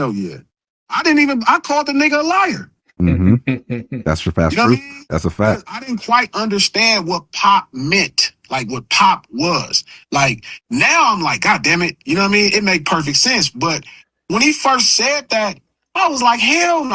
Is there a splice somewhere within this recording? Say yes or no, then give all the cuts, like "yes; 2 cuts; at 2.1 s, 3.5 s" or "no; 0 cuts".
no; 0 cuts